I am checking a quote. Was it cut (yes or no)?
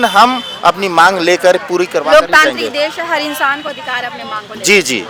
no